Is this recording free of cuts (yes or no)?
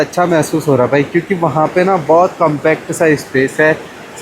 yes